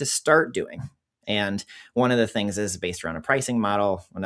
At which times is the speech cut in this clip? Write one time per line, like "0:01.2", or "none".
none